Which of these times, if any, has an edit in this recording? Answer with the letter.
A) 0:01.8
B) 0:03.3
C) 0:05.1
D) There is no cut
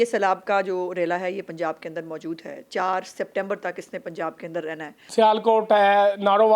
C